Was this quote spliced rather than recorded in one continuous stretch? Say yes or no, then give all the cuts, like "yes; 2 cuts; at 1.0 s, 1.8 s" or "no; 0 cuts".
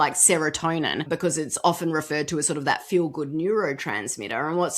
yes; 1 cut; at 1.0 s